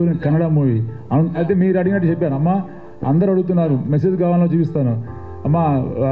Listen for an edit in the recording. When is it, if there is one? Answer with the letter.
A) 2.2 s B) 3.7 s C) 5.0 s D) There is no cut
D